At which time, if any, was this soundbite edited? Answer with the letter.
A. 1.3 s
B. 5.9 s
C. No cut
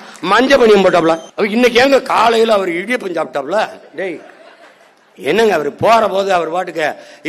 A